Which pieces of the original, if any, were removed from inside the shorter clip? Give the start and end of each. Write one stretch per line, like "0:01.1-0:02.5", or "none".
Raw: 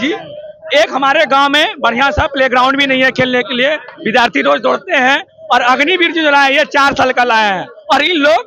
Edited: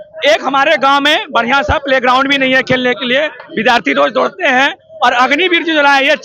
none